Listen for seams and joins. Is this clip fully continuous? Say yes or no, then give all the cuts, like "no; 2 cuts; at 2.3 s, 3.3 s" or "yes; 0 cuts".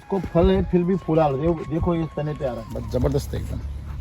no; 1 cut; at 2.7 s